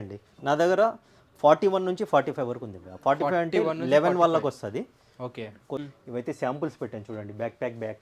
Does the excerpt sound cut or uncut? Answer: cut